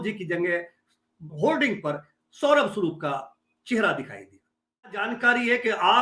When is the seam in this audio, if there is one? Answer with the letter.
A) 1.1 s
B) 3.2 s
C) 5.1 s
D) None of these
C